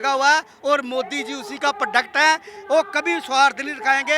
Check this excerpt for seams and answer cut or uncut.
uncut